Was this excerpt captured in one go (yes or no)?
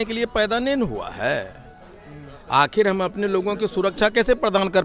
yes